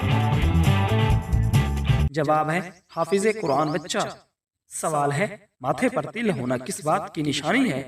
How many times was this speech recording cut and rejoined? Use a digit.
0